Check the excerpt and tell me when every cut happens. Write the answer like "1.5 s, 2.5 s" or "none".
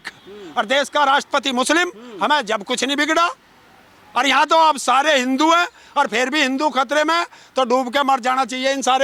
none